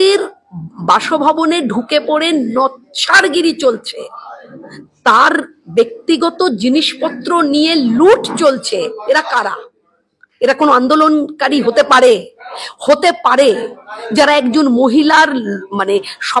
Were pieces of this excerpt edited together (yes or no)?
no